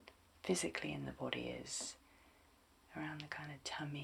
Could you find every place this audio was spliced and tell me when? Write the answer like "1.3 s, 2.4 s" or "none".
none